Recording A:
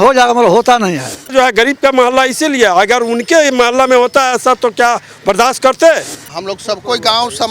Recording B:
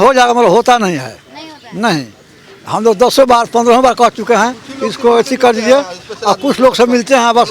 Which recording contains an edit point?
A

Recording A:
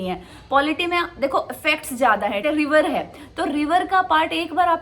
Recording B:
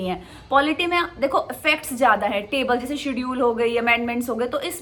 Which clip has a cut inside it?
A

